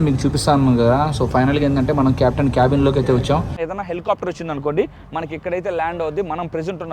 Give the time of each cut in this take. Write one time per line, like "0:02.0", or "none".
0:03.6